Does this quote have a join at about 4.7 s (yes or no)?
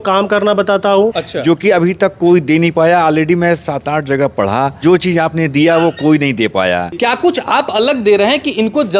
yes